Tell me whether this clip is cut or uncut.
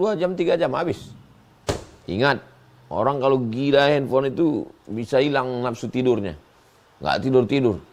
uncut